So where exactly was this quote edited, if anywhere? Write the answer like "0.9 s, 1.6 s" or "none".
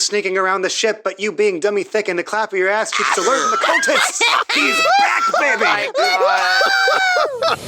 none

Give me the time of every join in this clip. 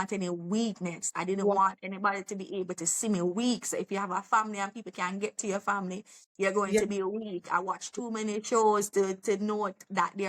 1.0 s

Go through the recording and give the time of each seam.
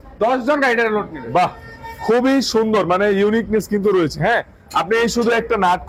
none

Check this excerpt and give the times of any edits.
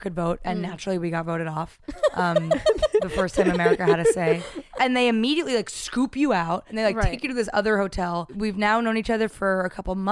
4.7 s, 6.7 s, 8.3 s

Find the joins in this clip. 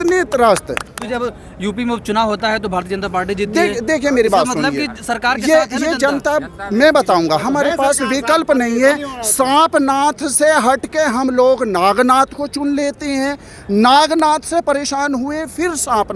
1.0 s

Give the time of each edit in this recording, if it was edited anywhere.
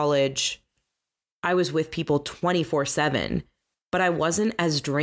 none

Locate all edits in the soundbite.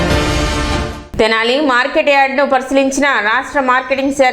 1.0 s

